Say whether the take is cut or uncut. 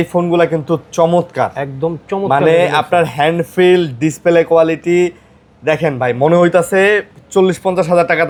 uncut